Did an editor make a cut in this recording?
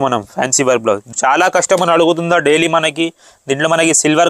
yes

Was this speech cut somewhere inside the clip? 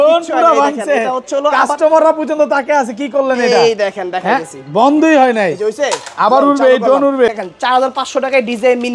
yes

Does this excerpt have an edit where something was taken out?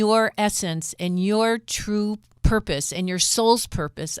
yes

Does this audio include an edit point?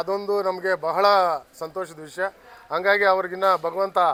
no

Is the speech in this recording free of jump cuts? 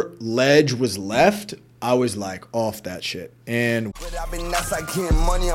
no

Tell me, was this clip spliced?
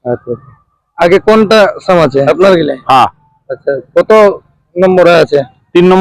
yes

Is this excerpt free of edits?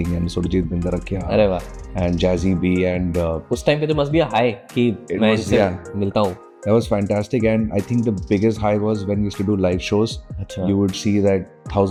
yes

